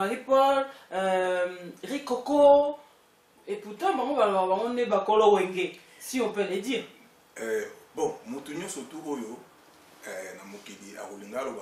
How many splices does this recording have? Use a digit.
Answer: 0